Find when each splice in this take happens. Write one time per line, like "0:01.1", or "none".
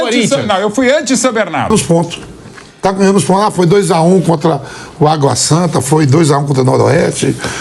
0:01.7